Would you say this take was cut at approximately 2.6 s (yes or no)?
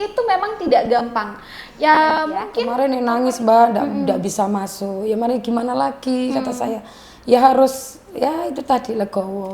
yes